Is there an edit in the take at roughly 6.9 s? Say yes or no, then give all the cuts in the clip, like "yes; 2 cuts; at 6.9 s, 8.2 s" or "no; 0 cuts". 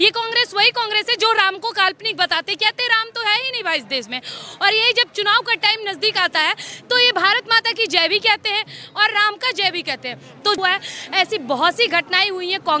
no; 1 cut; at 10.6 s